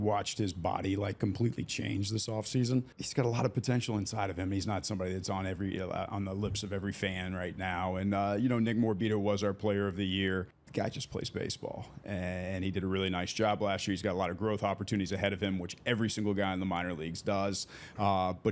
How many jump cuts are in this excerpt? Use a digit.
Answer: 2